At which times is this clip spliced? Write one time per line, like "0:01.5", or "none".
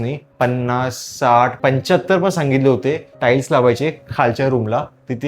0:01.5